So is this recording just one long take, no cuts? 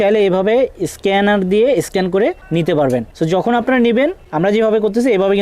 no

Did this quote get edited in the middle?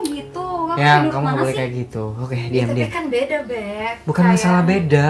no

